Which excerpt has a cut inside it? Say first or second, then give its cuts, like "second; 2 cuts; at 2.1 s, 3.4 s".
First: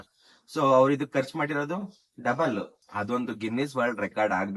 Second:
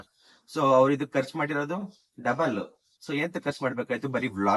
first; 1 cut; at 2.8 s